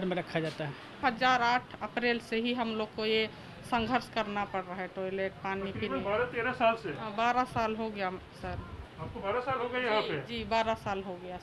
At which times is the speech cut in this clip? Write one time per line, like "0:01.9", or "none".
0:01.0